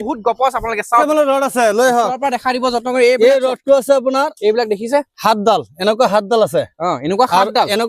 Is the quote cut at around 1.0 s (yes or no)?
yes